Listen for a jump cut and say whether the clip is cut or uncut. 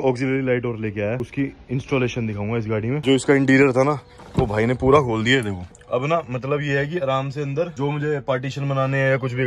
cut